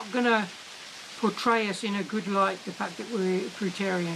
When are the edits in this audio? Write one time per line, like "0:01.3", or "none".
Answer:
none